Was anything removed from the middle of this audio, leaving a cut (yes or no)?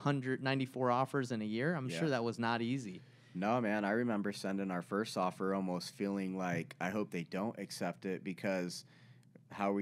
no